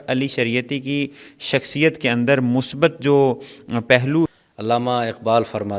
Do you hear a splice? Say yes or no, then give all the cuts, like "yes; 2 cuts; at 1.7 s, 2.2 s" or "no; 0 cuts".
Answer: yes; 1 cut; at 4.3 s